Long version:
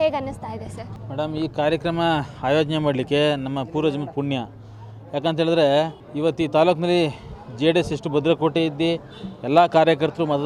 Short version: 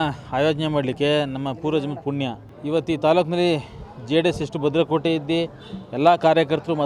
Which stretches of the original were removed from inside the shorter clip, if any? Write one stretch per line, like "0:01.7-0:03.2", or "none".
0:04.6-0:06.0